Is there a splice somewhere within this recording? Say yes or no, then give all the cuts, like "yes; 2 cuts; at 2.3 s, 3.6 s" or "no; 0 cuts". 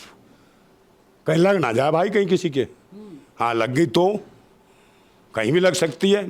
no; 0 cuts